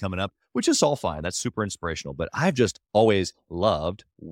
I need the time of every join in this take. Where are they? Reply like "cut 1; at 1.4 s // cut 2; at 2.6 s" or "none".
cut 1; at 2.8 s